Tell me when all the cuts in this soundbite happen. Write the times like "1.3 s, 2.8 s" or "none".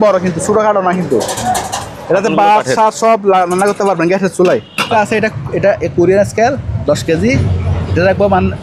4.9 s